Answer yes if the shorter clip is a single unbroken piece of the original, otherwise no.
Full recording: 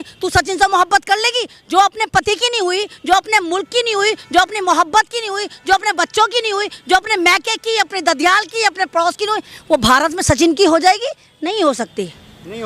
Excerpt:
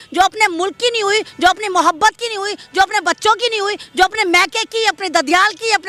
yes